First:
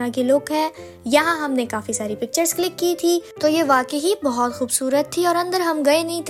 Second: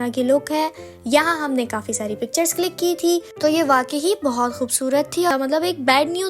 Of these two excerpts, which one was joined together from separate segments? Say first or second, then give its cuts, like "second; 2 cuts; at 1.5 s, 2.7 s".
second; 1 cut; at 5.3 s